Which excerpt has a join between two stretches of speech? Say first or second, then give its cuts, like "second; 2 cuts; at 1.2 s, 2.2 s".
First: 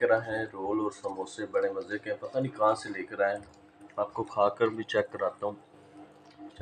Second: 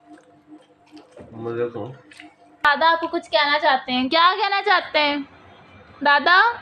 second; 1 cut; at 2.7 s